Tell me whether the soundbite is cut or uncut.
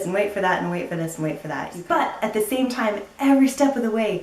cut